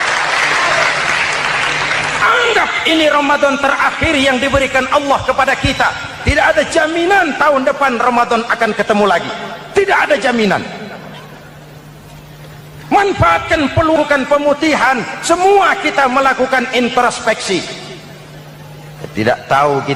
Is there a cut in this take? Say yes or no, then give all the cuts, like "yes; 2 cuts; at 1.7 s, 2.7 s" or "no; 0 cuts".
no; 0 cuts